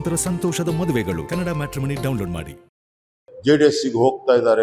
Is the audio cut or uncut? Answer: cut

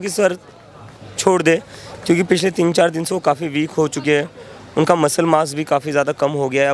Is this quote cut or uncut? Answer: uncut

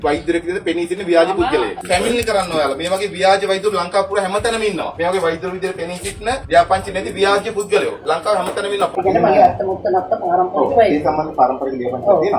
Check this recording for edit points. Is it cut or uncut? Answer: cut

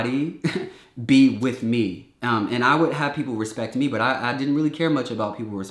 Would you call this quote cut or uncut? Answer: uncut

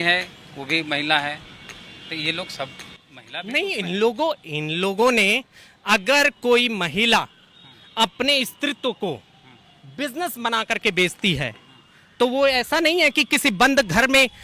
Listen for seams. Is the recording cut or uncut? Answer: uncut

